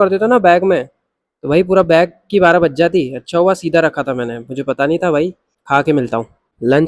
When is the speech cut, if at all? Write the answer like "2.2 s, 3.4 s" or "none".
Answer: none

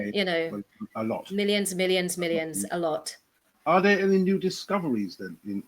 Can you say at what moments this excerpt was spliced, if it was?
none

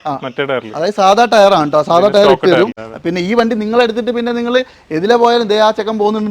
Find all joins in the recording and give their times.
2.9 s

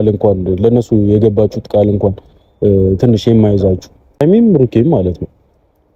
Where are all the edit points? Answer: 4.2 s

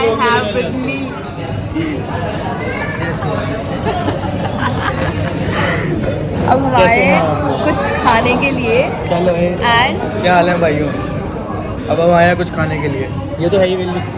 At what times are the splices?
none

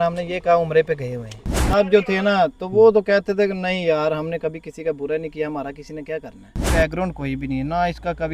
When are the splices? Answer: 1.7 s, 6.6 s

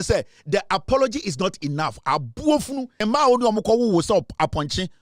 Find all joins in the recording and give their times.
3.0 s

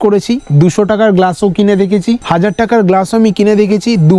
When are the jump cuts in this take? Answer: none

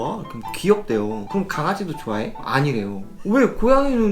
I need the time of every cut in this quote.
1.3 s, 3.1 s

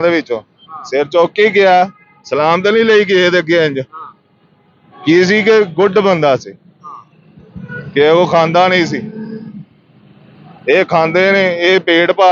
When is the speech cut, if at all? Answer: none

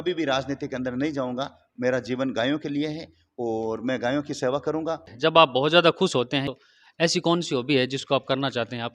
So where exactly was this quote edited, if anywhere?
5.1 s, 6.5 s

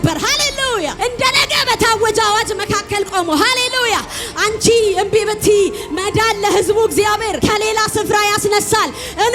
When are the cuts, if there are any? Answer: 0.9 s, 7.4 s

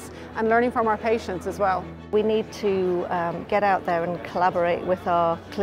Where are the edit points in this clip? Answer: 2.1 s

